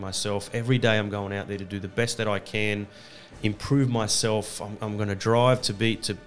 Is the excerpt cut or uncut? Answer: uncut